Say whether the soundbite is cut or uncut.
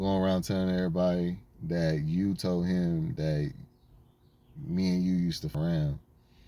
cut